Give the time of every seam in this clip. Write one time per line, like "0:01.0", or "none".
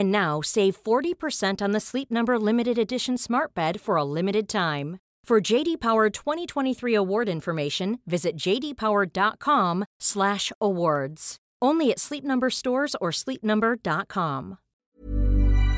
0:14.7

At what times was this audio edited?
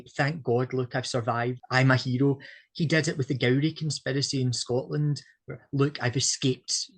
0:01.6

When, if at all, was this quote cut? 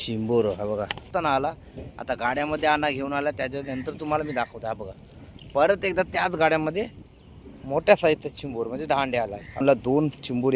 0:01.1
0:09.6

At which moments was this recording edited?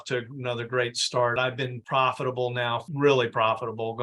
0:01.3
0:02.9

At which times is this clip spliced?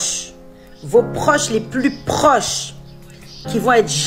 none

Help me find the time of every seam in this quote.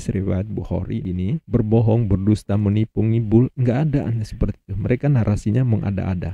0:01.0

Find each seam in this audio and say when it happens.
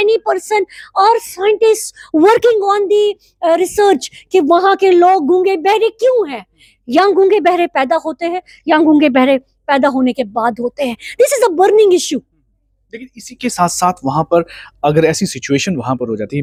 none

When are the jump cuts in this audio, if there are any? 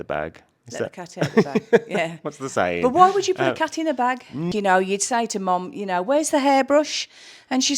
0:04.5

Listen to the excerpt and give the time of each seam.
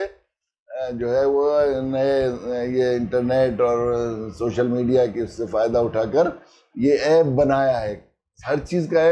none

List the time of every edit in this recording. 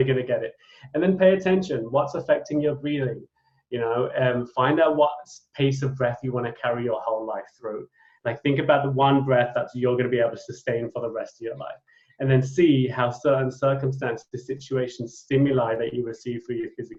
none

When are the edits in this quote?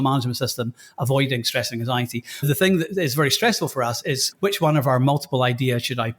none

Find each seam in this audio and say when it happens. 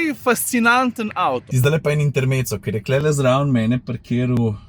0:01.5

